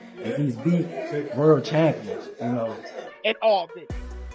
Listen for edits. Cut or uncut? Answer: cut